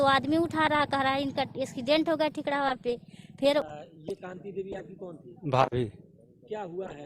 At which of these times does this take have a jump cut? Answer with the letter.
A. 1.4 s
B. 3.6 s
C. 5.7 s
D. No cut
B